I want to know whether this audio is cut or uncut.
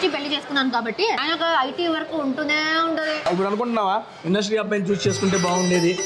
cut